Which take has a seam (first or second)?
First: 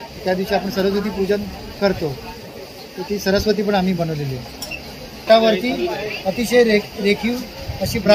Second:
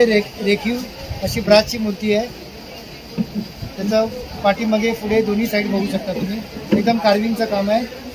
first